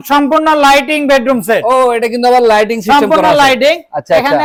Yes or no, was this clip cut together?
no